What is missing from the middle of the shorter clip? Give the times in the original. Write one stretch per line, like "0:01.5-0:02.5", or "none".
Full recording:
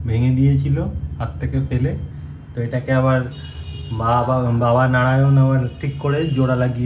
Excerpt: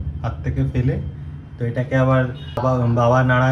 0:03.6-0:04.2